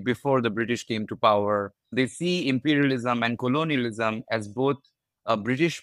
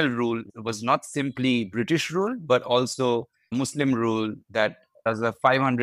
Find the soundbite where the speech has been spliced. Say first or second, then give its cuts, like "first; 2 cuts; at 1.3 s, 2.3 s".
first; 1 cut; at 1.8 s